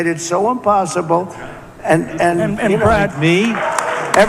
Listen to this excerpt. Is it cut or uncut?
uncut